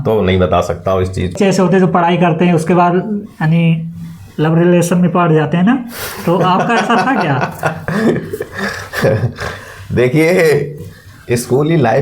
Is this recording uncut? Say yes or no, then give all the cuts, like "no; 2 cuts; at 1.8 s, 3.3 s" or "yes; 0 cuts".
no; 1 cut; at 1.3 s